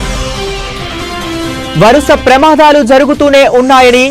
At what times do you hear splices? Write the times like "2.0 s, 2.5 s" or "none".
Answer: 1.6 s